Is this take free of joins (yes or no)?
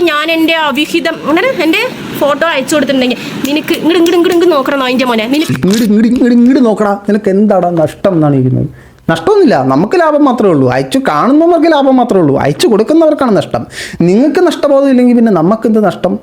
no